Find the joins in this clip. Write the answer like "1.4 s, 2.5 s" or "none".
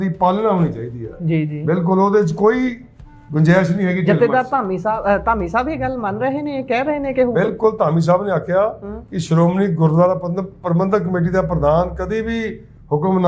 none